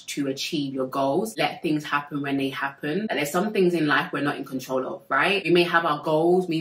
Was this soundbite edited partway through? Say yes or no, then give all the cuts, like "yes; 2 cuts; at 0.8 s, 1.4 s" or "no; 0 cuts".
yes; 3 cuts; at 1.3 s, 3.1 s, 5.4 s